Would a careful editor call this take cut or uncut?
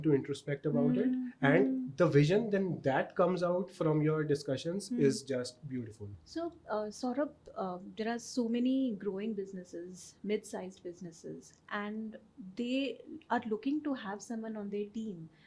uncut